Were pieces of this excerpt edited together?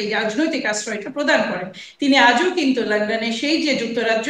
no; 0 cuts

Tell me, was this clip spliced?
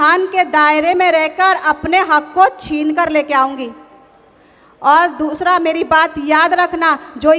no; 0 cuts

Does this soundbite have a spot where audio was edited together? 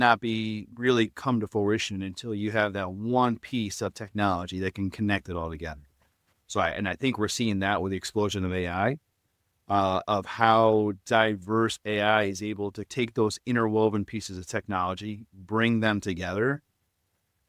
no; 0 cuts

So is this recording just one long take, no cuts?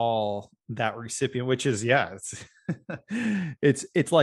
yes; 0 cuts

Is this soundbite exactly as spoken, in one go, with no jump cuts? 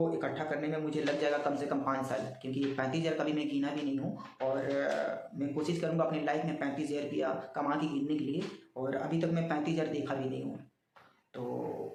yes; 0 cuts

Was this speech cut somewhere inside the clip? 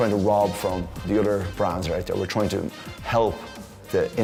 no; 0 cuts

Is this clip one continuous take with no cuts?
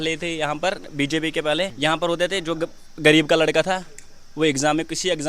no; 1 cut; at 1.7 s

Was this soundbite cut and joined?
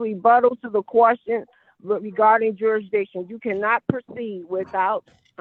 no; 0 cuts

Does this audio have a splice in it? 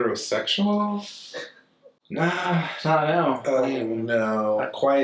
no; 0 cuts

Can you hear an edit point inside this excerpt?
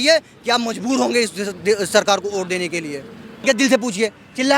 yes; 1 cut; at 3.2 s

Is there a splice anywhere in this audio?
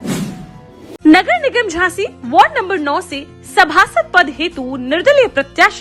yes; 1 cut; at 0.9 s

